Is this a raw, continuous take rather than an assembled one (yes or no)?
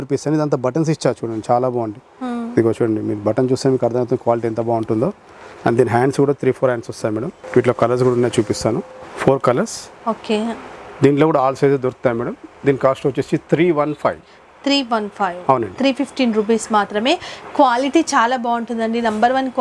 yes